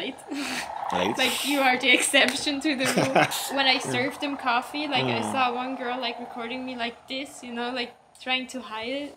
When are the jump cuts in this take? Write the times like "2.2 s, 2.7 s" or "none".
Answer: 3.3 s